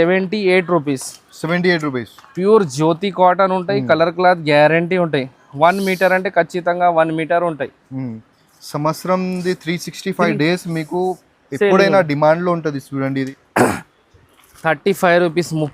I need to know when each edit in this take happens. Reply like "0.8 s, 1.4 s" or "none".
13.4 s

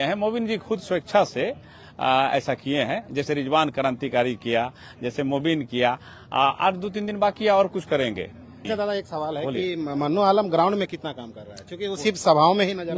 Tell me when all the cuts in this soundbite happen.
8.6 s

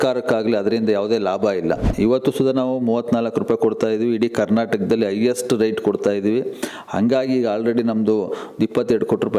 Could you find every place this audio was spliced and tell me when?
1.9 s

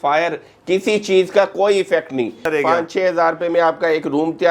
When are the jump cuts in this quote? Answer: 2.4 s

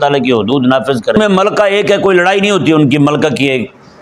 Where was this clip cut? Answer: 1.2 s

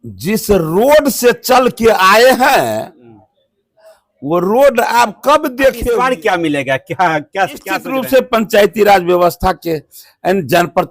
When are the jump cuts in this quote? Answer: 5.8 s, 7.9 s

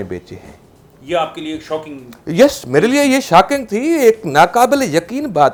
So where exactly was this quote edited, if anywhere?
none

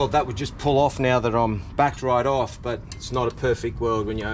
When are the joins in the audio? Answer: none

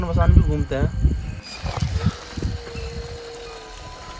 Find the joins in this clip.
1.3 s

